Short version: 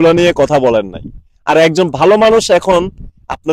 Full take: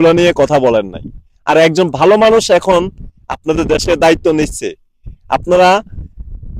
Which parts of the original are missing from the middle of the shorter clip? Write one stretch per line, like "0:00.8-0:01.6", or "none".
none